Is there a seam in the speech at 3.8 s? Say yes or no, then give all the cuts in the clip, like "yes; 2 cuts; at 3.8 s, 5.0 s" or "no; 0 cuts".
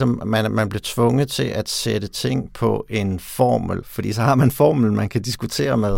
yes; 1 cut; at 3.8 s